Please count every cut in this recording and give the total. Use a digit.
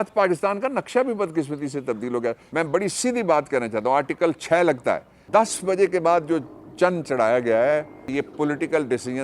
3